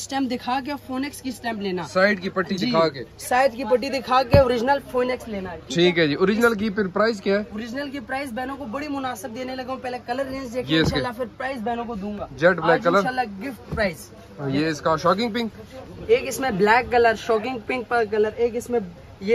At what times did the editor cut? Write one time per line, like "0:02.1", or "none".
none